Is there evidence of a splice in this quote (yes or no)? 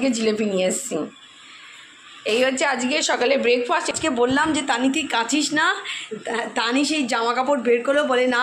yes